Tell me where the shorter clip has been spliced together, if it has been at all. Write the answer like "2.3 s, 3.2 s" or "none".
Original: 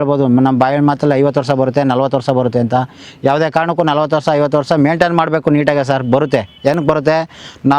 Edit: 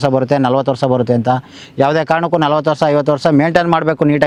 none